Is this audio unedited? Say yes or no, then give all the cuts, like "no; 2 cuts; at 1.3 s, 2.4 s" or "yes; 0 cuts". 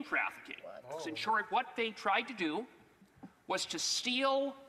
no; 1 cut; at 1.2 s